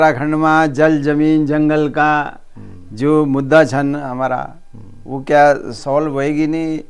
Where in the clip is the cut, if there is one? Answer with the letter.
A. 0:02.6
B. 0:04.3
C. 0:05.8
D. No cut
C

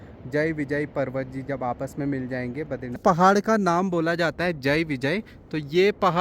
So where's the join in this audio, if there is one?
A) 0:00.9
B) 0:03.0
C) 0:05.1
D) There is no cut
B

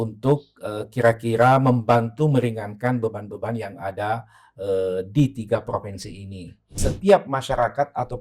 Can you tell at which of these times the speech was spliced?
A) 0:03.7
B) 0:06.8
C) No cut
B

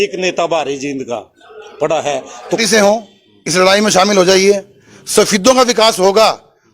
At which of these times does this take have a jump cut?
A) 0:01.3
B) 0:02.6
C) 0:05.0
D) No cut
B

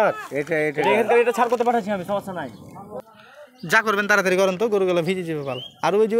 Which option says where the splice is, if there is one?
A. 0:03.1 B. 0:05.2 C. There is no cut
A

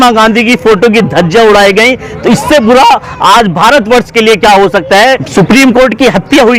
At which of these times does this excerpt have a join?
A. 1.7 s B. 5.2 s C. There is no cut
B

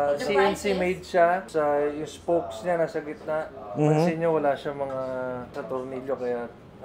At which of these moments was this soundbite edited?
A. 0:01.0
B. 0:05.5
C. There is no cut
C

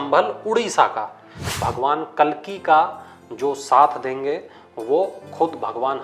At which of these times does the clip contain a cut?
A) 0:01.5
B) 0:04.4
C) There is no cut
A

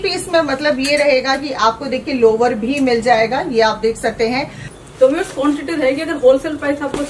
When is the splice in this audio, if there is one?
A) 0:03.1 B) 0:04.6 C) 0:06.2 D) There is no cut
B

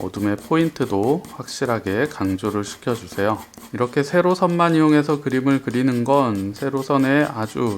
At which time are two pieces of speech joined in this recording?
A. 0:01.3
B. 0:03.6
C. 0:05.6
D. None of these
B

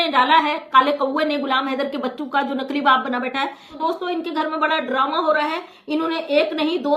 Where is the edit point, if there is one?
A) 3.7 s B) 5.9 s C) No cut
A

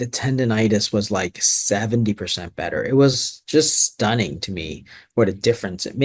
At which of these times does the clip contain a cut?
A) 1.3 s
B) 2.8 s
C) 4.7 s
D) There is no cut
D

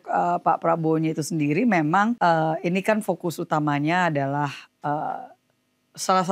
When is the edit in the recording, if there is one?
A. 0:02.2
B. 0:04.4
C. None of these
A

